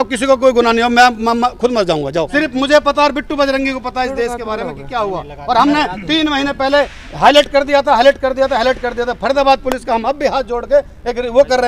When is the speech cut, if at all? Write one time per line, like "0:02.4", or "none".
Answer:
0:02.3